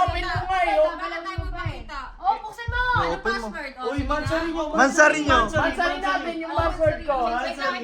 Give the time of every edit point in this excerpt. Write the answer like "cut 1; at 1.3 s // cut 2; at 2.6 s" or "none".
none